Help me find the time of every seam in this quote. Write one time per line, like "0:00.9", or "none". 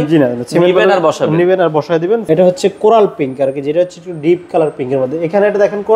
0:02.2